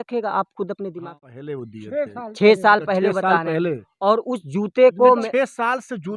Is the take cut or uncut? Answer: cut